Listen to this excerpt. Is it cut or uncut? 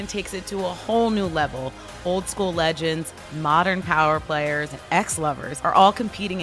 cut